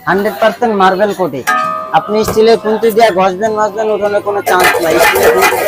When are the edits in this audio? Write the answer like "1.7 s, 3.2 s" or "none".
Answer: none